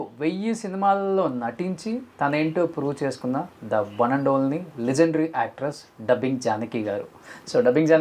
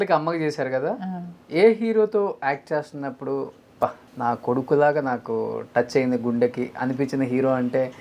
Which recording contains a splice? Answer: second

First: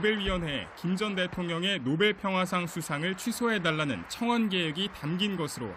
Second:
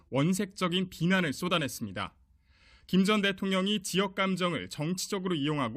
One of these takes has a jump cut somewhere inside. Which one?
first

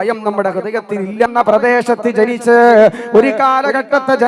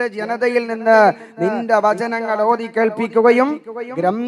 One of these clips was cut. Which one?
first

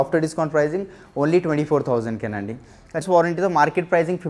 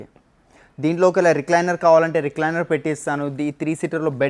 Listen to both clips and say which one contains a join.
first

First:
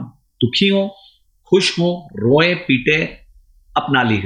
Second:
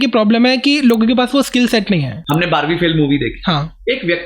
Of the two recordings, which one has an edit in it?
second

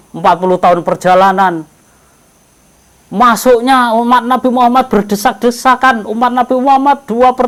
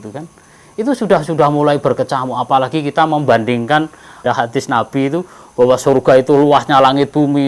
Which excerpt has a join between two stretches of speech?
second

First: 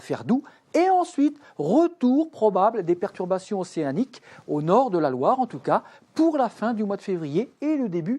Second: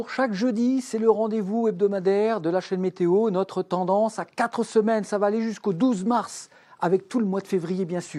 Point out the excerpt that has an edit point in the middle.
first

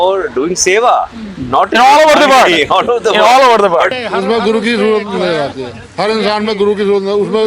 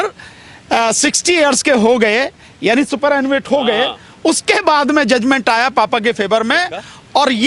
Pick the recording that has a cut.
first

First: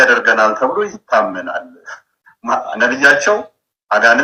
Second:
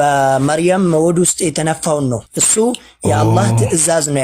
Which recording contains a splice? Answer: second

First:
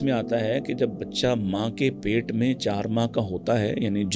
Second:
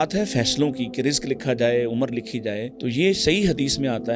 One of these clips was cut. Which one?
second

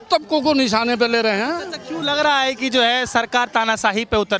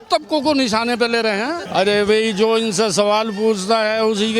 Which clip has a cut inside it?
second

